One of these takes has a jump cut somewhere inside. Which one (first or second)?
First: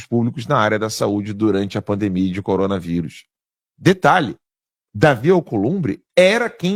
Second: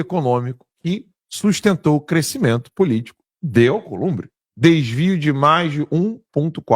second